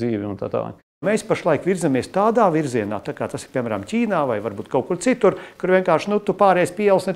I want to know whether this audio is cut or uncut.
cut